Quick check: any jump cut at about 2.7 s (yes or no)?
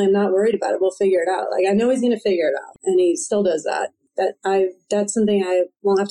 yes